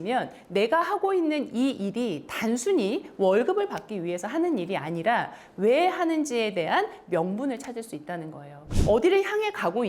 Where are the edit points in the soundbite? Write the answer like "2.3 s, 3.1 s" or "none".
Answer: 8.6 s